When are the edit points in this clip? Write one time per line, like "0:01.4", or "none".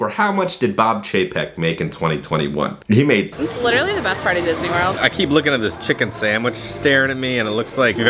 0:03.3
0:05.0